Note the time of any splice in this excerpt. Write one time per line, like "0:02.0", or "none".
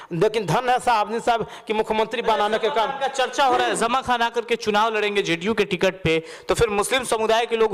none

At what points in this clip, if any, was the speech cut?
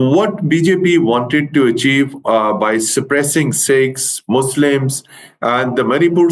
none

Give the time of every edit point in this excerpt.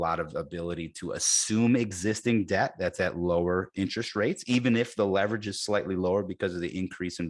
none

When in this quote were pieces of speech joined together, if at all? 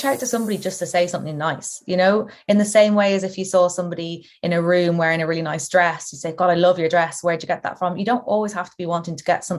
none

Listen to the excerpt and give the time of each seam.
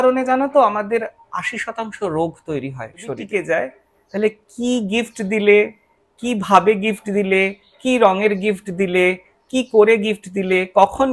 0:03.2

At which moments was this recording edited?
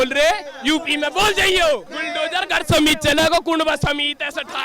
0:02.0

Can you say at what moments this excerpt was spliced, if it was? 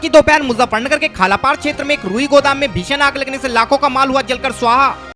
none

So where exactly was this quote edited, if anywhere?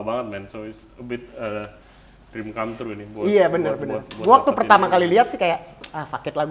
none

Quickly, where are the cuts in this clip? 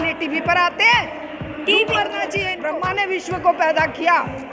0:02.5

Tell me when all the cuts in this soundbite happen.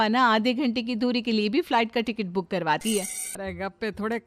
0:03.2

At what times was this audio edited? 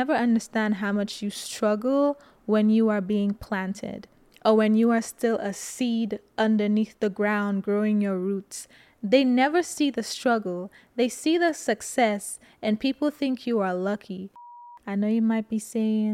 0:14.5

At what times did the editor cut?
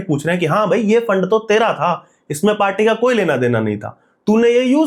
none

